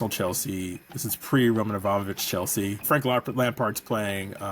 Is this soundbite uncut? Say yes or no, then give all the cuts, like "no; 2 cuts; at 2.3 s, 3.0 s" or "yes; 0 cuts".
no; 1 cut; at 2.8 s